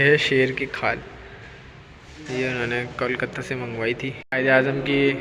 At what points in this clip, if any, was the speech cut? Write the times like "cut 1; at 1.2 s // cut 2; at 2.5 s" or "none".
cut 1; at 4.2 s